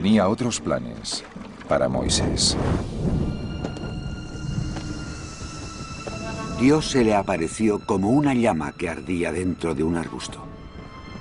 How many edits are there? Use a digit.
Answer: 1